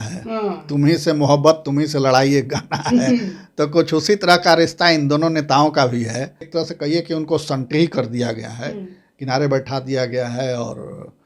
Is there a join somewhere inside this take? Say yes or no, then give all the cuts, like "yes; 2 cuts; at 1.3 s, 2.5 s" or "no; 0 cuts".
yes; 1 cut; at 6.4 s